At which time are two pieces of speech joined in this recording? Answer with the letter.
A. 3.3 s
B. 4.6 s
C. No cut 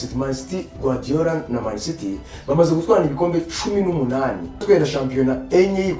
B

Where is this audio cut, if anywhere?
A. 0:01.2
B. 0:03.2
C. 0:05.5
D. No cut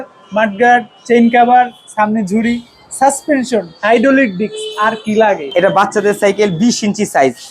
C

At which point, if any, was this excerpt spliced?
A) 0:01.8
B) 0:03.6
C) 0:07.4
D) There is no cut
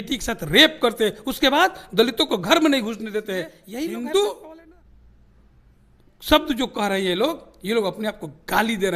B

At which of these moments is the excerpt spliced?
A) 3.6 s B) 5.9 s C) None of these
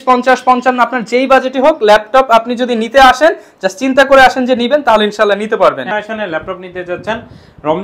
B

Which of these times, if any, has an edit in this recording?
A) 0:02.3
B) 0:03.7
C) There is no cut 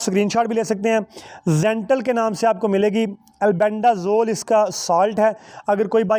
C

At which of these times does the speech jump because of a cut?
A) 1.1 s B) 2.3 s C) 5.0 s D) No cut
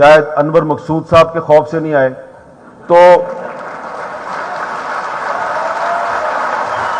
D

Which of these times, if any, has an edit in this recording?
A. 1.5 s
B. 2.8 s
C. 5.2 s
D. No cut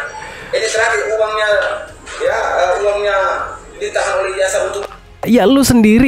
C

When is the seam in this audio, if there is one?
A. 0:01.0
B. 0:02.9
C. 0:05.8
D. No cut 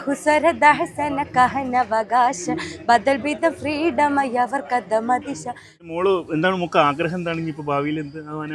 C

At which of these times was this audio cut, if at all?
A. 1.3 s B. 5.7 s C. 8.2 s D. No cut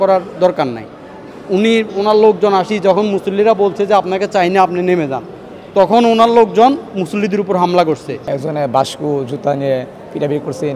C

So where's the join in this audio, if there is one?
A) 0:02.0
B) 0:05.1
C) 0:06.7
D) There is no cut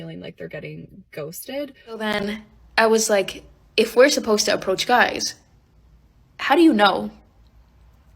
A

